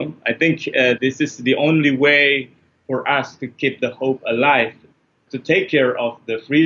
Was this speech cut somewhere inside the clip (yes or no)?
yes